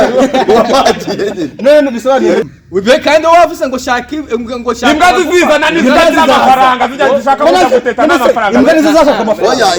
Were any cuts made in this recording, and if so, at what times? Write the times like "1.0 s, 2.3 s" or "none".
2.5 s